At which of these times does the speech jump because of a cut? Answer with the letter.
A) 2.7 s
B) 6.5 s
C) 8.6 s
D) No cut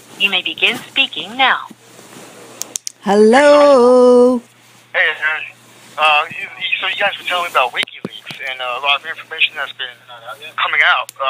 D